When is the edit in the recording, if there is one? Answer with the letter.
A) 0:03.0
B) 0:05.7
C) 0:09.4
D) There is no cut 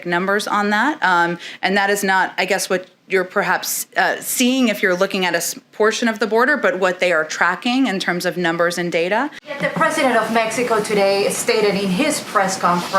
C